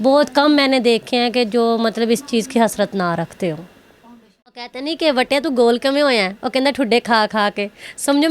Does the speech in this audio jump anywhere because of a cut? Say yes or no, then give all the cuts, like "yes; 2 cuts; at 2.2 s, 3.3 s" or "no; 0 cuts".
yes; 1 cut; at 4.7 s